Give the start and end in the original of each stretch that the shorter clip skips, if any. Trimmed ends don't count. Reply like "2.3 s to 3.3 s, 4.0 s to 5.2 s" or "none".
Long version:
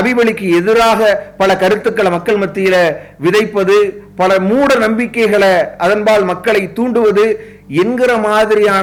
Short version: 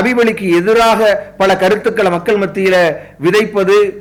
none

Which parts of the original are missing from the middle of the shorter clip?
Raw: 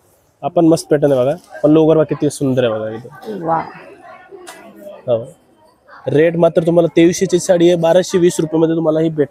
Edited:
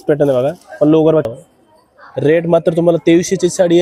2.1 s to 5.2 s

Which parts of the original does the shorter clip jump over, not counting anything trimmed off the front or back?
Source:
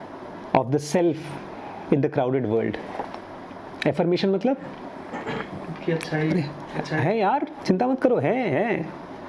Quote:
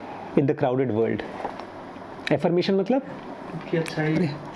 5.0 s to 5.6 s

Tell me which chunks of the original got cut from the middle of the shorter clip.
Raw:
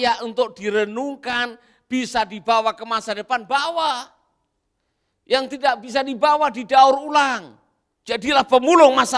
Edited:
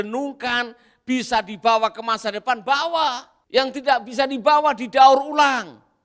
4.2 s to 5.1 s

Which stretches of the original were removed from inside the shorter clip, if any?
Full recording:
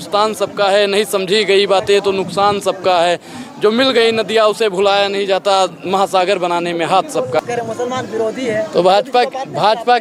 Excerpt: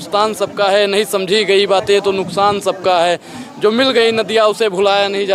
none

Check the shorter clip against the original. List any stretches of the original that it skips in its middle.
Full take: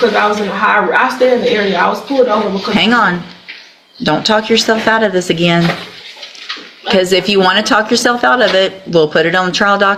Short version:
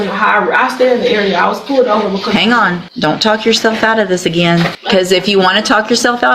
3.3 s to 3.9 s, 5.8 s to 6.8 s

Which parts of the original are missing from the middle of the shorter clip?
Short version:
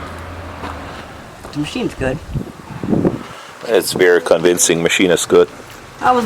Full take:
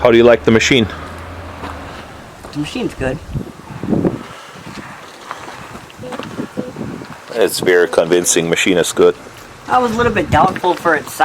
4.4 s to 7.1 s

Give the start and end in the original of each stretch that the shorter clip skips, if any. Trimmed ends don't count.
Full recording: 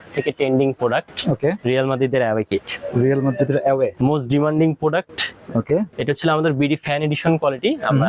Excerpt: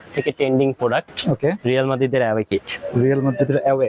none

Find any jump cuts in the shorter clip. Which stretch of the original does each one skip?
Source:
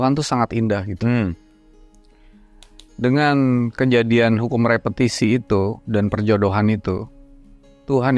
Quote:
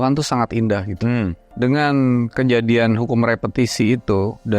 1.4 s to 2.9 s

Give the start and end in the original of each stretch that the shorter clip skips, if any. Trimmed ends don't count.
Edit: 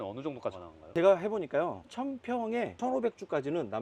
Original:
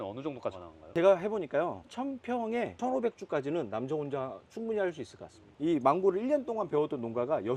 none

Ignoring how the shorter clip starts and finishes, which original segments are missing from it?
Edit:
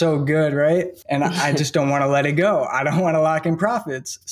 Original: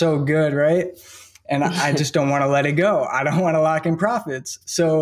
1.0 s to 1.4 s

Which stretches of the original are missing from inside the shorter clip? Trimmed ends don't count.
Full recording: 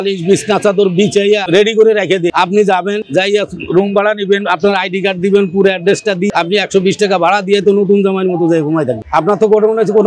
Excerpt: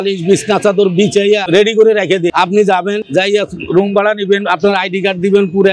none

